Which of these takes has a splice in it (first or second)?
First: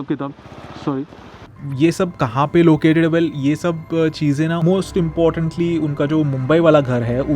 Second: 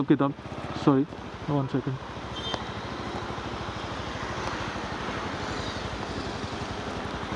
first